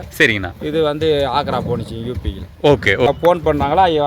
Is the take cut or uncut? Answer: cut